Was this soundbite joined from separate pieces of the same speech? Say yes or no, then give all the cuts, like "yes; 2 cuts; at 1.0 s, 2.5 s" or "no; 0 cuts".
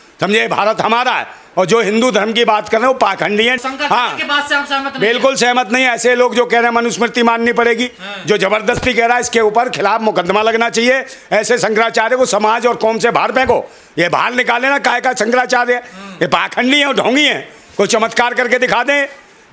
no; 0 cuts